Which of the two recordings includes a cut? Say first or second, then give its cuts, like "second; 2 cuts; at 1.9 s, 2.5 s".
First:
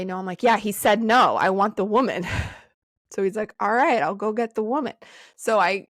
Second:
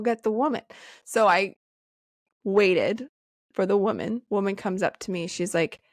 second; 1 cut; at 4.2 s